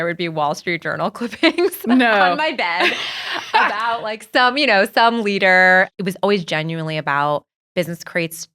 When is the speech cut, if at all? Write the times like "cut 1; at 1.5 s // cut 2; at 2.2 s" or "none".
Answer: cut 1; at 5.9 s